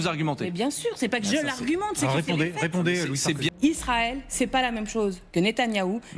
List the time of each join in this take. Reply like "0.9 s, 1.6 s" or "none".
3.5 s